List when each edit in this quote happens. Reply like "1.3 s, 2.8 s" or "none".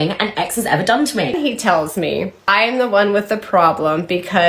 1.3 s, 2.5 s